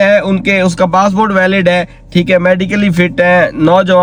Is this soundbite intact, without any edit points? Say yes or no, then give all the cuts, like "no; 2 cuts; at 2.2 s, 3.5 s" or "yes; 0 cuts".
yes; 0 cuts